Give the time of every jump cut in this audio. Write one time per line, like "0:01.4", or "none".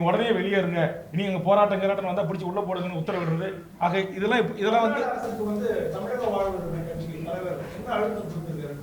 none